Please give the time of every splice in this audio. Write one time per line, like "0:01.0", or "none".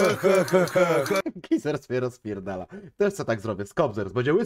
0:01.2